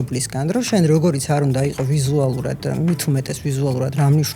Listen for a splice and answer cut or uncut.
uncut